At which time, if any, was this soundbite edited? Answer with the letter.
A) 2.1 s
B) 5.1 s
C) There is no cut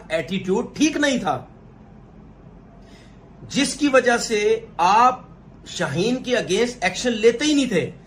C